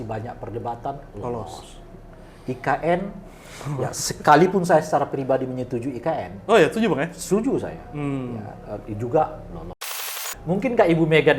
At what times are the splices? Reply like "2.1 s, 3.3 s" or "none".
9.9 s